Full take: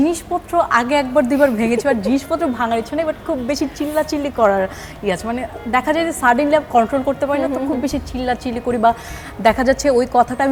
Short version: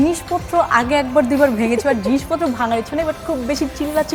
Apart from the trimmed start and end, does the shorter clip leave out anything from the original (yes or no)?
no